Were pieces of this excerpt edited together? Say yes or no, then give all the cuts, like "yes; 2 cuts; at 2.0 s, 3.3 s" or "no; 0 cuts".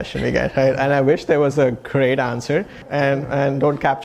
yes; 1 cut; at 2.8 s